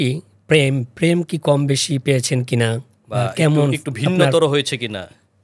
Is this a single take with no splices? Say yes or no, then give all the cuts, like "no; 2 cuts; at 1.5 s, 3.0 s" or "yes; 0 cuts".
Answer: yes; 0 cuts